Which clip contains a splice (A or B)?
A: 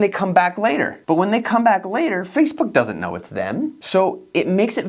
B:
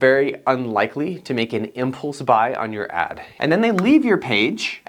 B